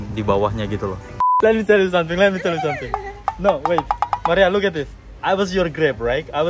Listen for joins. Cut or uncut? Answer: cut